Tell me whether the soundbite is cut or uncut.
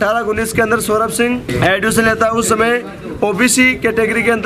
cut